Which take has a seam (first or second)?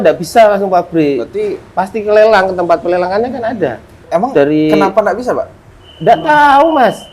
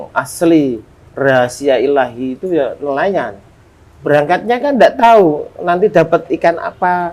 first